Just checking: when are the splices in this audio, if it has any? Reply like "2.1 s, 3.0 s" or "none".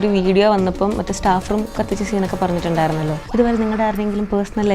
3.2 s